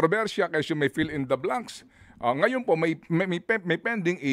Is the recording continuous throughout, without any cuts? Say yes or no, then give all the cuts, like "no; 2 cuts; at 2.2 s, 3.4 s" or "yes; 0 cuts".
yes; 0 cuts